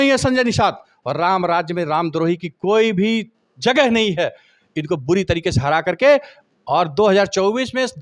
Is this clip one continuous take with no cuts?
yes; 0 cuts

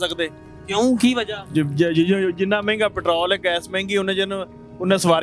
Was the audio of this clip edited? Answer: no; 0 cuts

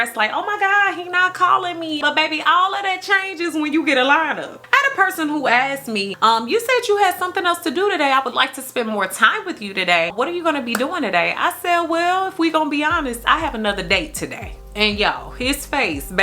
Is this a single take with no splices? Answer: no; 2 cuts; at 2.0 s, 4.5 s

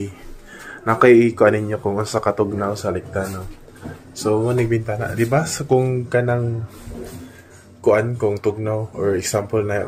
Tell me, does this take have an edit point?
no; 0 cuts

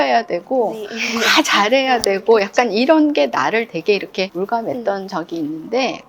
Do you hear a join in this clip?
no; 0 cuts

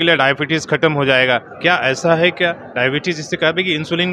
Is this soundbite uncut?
yes; 0 cuts

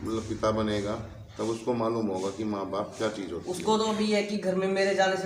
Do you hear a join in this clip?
no; 0 cuts

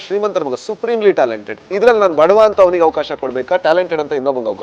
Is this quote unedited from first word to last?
yes; 0 cuts

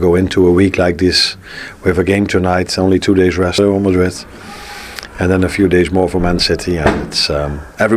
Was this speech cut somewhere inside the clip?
yes; 1 cut; at 3.6 s

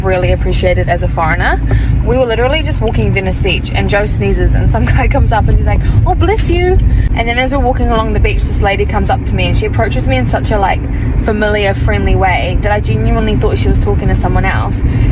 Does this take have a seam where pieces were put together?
no; 0 cuts

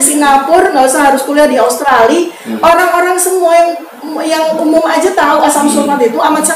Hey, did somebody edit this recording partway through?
no; 0 cuts

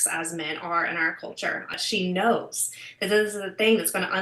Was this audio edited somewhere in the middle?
yes; 1 cut; at 1.8 s

